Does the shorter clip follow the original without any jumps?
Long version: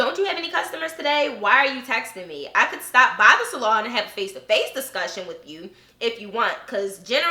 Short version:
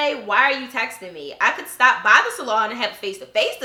yes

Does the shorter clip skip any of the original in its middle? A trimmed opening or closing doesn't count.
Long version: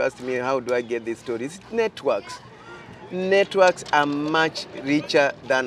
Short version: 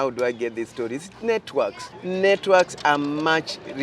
yes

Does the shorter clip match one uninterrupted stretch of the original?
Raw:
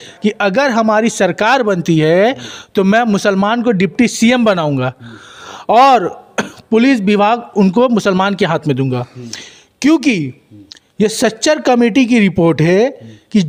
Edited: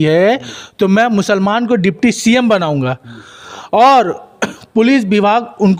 yes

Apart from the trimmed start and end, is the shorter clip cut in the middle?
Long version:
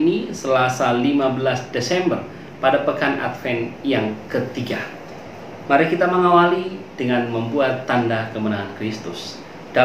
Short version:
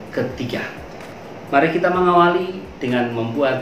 no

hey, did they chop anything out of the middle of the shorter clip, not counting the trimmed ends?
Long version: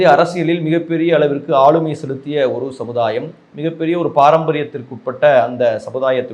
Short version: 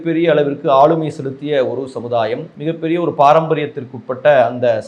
yes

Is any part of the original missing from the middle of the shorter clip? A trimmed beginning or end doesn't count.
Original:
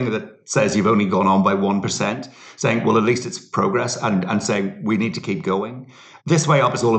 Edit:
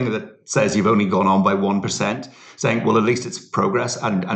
no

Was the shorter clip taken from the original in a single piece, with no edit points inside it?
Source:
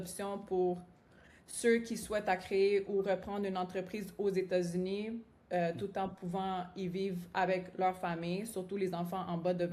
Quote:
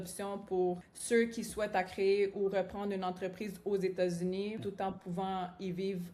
no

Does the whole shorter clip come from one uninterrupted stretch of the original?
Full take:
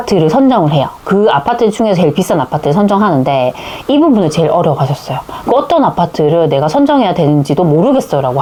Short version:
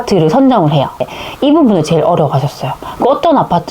no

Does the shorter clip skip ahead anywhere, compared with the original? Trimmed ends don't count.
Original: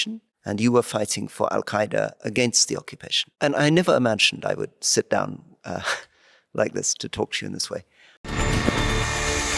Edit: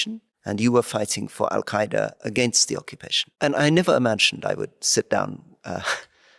no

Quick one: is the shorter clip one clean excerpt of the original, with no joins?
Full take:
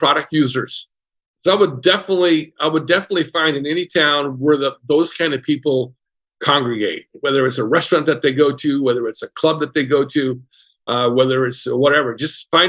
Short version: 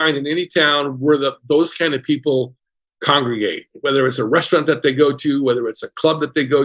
yes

